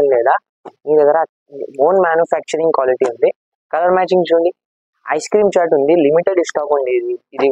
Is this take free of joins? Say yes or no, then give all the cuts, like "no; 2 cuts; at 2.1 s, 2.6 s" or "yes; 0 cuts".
yes; 0 cuts